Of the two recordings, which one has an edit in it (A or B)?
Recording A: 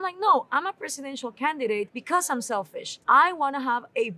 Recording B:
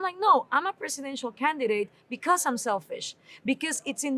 A